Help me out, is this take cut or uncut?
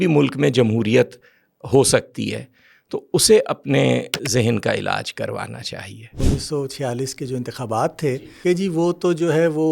cut